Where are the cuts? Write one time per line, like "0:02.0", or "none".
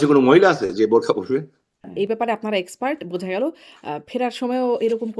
0:01.9